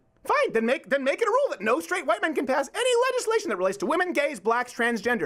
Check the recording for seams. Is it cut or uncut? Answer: uncut